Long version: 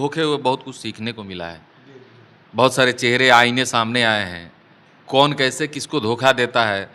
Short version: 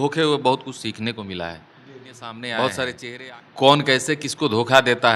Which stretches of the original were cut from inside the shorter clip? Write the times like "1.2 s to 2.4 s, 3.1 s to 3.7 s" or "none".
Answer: 3.0 s to 4.6 s

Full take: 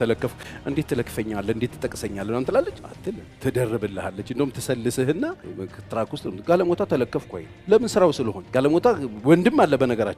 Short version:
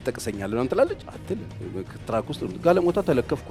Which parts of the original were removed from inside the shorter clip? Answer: 3.3 s to 5.4 s

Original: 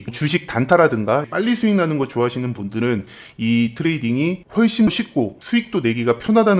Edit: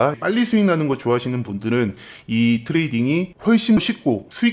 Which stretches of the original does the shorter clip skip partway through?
none

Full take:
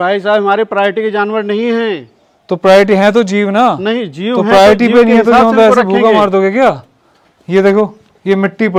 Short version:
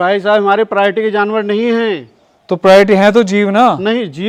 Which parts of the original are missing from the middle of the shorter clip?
none

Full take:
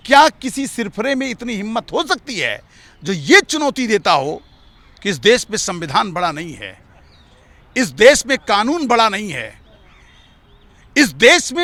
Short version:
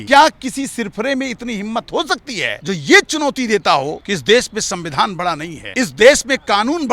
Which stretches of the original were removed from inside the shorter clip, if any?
2.5 s to 2.9 s, 4.4 s to 5.0 s, 6.5 s to 7.6 s

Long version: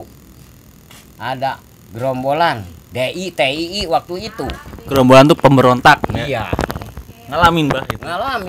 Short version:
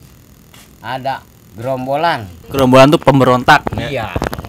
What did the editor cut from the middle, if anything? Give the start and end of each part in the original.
2.7 s to 4.7 s

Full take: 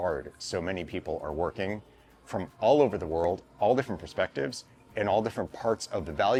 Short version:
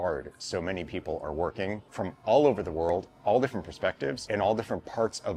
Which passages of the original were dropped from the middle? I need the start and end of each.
1.9 s to 2.2 s, 4.6 s to 4.9 s

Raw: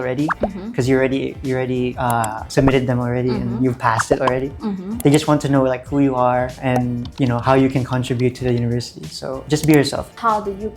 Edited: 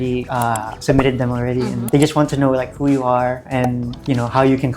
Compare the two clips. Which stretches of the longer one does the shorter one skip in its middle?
3.5 s to 5.0 s

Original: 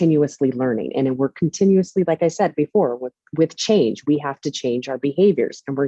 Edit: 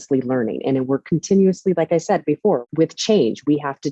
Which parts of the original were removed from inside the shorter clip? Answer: 3.0 s to 3.3 s

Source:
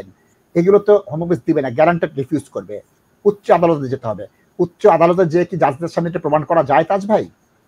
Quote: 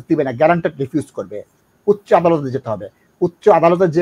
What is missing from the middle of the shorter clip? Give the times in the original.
none

